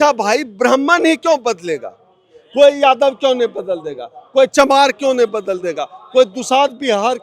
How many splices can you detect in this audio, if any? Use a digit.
0